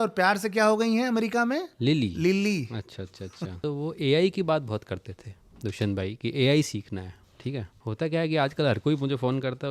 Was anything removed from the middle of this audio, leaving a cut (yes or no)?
yes